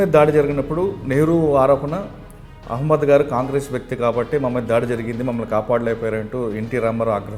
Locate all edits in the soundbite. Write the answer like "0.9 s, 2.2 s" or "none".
none